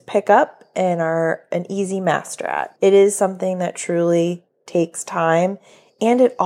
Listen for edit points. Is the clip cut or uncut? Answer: cut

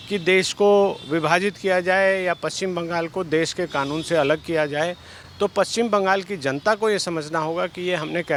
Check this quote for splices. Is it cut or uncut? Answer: uncut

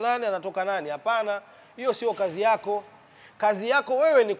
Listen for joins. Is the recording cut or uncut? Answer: uncut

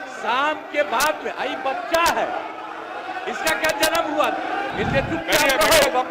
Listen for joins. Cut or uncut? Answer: cut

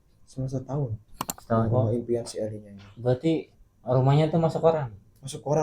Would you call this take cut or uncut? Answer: cut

